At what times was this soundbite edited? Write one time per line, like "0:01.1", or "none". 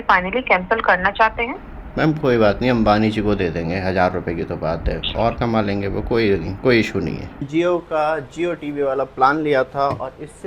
0:07.5